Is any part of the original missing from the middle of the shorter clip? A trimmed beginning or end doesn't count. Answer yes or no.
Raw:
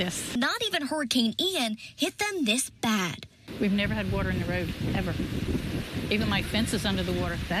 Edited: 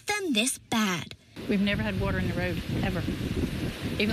no